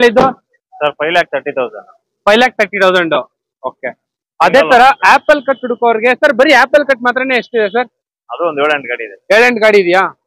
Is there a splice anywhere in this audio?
no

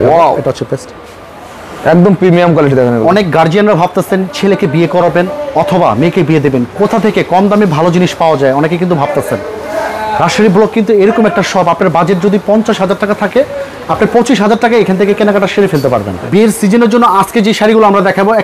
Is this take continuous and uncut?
no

